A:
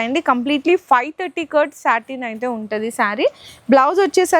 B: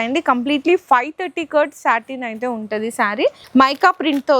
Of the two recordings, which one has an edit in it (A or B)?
B